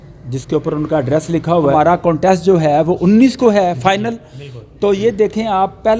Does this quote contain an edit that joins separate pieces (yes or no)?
yes